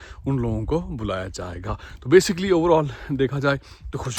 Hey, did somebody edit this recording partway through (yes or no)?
no